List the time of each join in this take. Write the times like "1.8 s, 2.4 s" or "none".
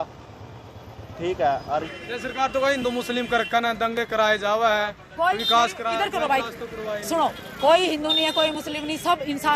1.8 s